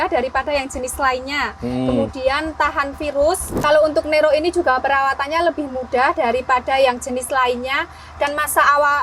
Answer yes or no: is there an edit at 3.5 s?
yes